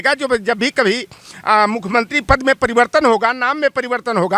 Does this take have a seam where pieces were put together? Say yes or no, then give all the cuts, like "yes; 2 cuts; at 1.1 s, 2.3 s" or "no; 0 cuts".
no; 0 cuts